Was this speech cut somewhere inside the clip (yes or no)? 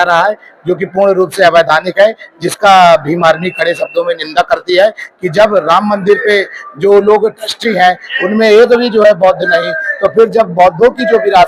no